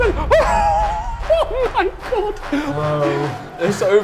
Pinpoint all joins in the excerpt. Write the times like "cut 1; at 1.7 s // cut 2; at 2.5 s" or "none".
cut 1; at 2.7 s